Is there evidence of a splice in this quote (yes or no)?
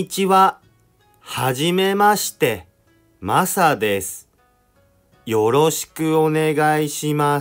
no